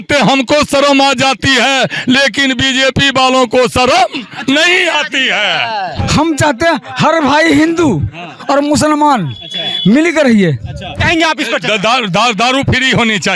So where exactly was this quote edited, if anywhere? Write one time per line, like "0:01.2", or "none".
0:06.0
0:10.9